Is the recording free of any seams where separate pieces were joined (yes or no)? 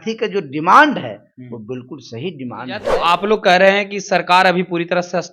no